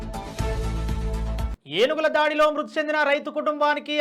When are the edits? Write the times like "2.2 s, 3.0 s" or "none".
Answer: 1.5 s